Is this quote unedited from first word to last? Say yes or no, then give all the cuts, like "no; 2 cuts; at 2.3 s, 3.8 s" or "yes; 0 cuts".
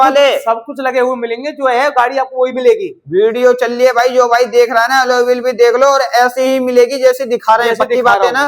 yes; 0 cuts